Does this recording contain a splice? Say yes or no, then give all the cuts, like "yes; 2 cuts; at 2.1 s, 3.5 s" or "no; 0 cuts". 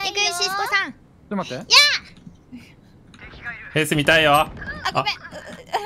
no; 0 cuts